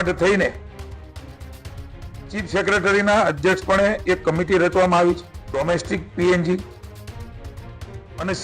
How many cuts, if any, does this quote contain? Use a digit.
1